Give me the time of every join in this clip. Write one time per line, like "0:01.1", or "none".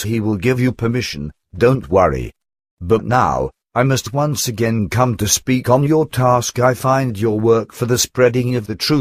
0:07.4

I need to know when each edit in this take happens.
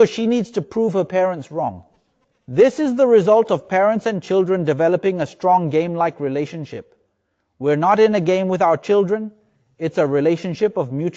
none

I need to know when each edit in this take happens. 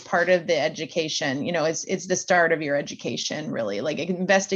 none

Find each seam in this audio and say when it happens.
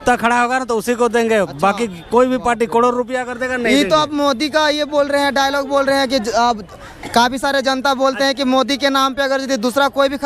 none

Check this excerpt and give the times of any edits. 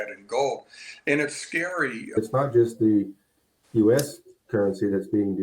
0:02.2

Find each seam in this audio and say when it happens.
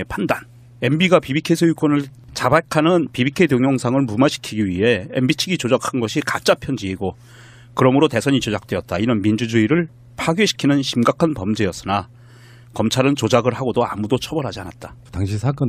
0:03.2

